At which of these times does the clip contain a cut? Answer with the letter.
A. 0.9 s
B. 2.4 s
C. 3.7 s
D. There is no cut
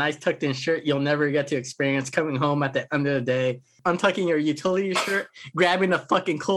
C